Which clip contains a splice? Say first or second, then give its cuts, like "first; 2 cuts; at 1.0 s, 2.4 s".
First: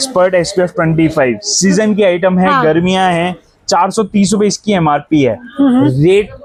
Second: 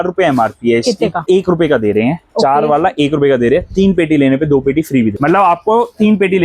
second; 2 cuts; at 1.2 s, 5.1 s